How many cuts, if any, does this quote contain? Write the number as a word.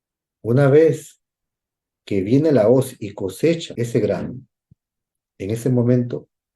one